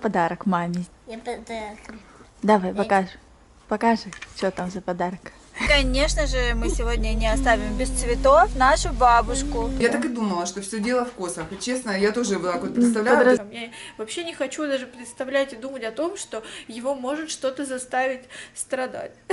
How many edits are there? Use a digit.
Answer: 3